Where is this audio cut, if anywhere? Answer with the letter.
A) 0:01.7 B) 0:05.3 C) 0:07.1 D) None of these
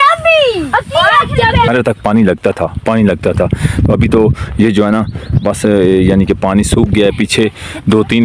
A